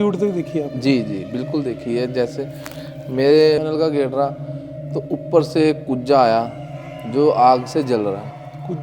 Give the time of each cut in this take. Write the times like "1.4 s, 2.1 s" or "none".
3.6 s